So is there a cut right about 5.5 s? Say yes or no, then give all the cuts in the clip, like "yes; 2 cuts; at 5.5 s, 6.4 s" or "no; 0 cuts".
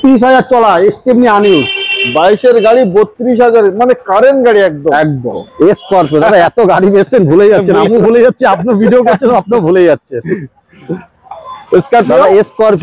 yes; 1 cut; at 5.5 s